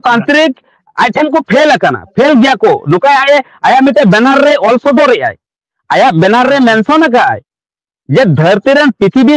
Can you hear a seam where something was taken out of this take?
no; 0 cuts

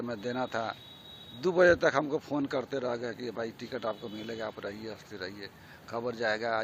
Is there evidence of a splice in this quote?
no; 0 cuts

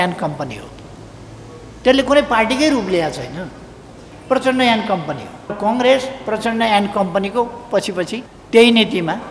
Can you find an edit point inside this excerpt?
yes; 2 cuts; at 5.6 s, 8.2 s

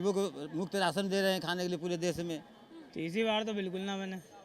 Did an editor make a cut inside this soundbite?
yes; 1 cut; at 3.0 s

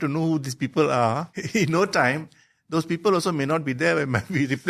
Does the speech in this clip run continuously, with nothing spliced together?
no; 1 cut; at 1.3 s

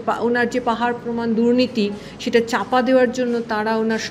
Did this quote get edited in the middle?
no; 0 cuts

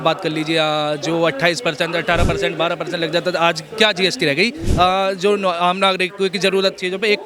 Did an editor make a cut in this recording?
no; 0 cuts

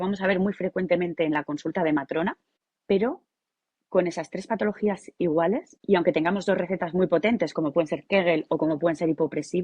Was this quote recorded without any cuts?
no; 1 cut; at 5.7 s

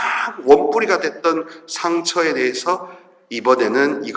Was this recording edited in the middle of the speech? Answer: no; 0 cuts

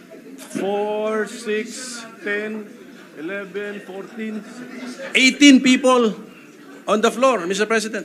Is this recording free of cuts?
yes; 0 cuts

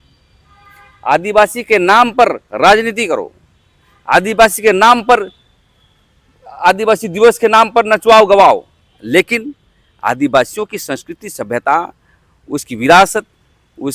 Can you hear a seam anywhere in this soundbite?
no; 0 cuts

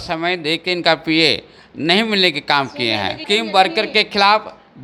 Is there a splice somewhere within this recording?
yes; 1 cut; at 3.2 s

